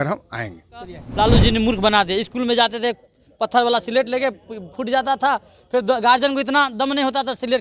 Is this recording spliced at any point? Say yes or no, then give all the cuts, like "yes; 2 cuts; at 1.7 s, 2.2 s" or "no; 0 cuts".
yes; 1 cut; at 1.0 s